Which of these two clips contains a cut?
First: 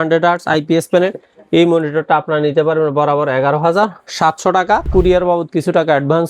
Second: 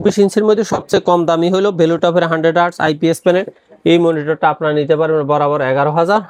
first; 1 cut; at 4.9 s

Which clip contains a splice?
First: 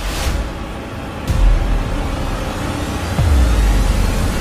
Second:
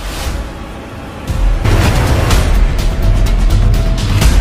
second; 1 cut; at 1.7 s

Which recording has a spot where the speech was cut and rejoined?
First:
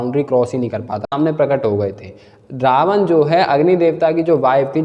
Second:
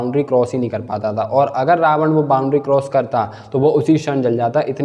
first; 1 cut; at 1.1 s

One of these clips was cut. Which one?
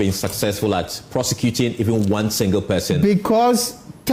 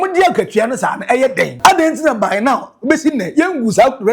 second; 1 cut; at 1.5 s

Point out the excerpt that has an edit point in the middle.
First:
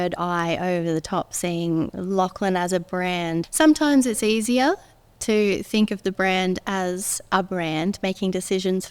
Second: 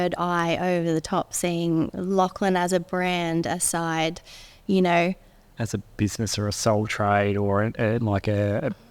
first; 1 cut; at 3.5 s

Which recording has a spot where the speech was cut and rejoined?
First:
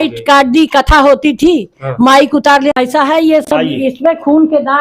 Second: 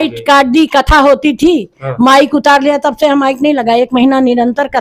first; 1 cut; at 2.7 s

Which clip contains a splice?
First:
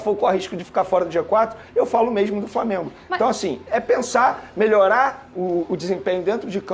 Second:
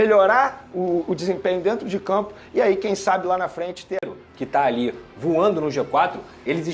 second; 1 cut; at 4.1 s

